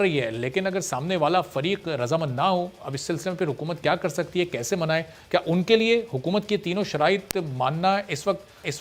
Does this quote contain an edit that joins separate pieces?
no; 0 cuts

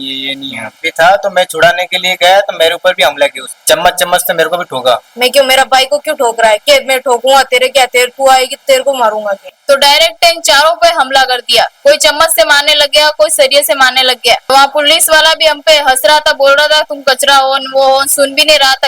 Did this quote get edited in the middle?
yes; 4 cuts; at 0.9 s, 5.0 s, 9.4 s, 14.4 s

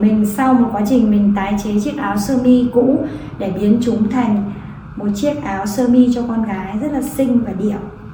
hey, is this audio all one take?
yes; 0 cuts

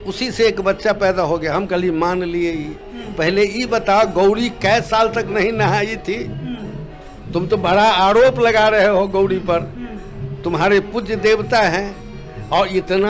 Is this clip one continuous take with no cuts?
yes; 0 cuts

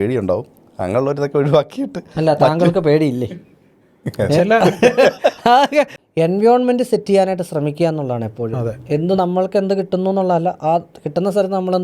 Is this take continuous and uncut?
no; 1 cut; at 6.0 s

